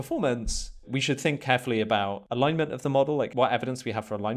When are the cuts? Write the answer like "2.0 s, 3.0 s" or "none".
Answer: 0.9 s, 2.2 s, 3.3 s